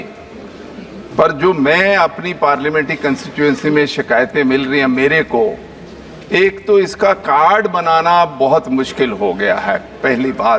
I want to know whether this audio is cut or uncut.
uncut